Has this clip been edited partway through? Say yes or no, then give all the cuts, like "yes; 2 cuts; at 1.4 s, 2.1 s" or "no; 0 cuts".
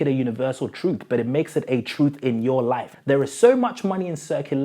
yes; 1 cut; at 2.9 s